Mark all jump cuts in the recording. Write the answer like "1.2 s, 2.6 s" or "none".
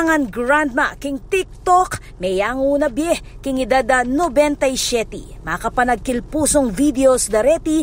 none